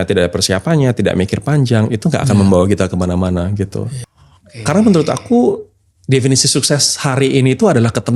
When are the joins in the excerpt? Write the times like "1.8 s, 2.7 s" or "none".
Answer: 3.9 s